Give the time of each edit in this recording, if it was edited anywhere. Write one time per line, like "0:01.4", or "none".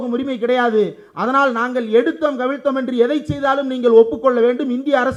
none